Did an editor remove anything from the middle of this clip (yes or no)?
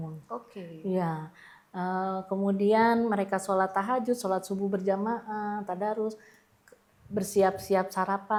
no